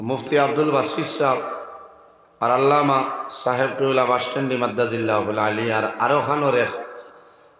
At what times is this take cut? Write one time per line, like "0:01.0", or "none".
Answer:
none